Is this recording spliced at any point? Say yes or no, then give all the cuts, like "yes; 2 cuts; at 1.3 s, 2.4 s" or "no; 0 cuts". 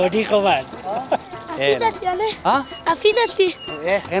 yes; 1 cut; at 1.4 s